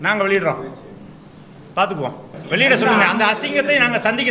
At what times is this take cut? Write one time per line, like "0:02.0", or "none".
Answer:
0:02.3